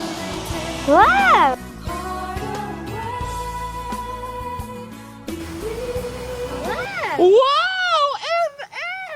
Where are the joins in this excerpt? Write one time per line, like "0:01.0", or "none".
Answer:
none